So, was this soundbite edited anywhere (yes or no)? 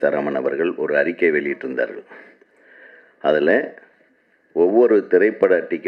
no